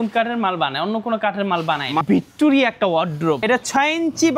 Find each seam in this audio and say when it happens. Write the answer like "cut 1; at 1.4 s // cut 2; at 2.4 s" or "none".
cut 1; at 2.0 s // cut 2; at 3.4 s